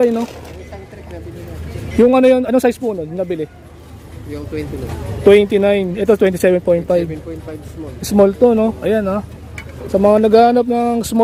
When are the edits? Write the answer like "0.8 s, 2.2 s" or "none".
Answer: none